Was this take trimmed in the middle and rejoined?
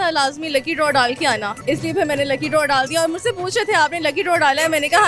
yes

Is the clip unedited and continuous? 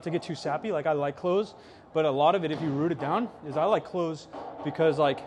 yes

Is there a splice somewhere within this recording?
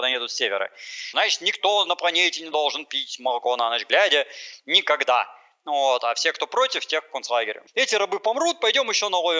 yes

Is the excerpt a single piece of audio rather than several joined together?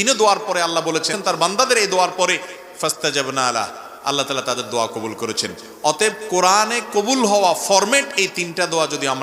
no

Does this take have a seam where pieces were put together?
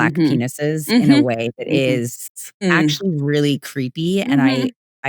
yes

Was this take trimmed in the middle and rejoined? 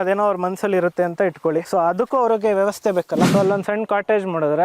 yes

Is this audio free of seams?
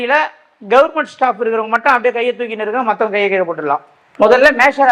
no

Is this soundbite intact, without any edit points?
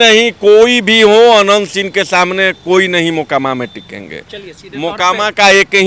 yes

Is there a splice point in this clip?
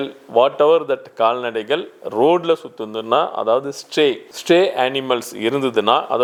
no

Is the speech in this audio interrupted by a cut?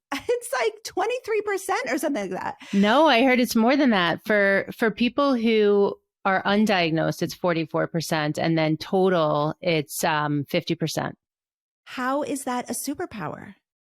yes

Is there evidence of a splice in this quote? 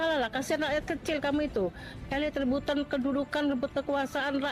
no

